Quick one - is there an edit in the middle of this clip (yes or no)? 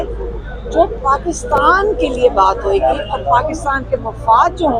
no